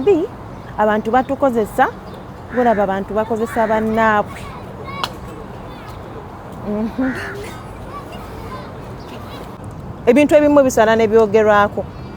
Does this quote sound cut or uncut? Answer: cut